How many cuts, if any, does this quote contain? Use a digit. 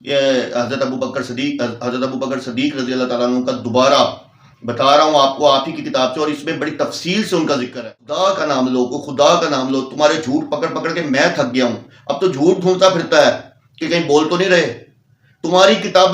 1